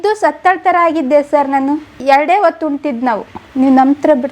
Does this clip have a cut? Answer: yes; 1 cut; at 1.9 s

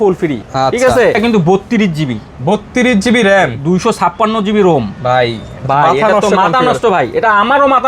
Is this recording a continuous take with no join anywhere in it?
no; 1 cut; at 1.2 s

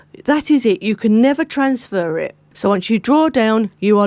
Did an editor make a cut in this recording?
yes; 1 cut; at 2.4 s

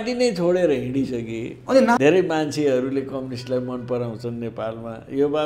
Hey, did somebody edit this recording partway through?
yes; 1 cut; at 2.0 s

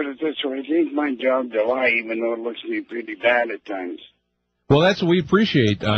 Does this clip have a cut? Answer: no; 0 cuts

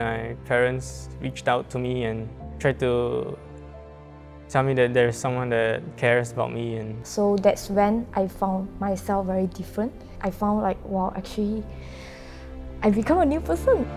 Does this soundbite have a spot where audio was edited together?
yes; 3 cuts; at 2.4 s, 7.0 s, 10.1 s

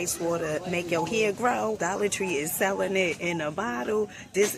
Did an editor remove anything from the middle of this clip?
yes; 1 cut; at 1.8 s

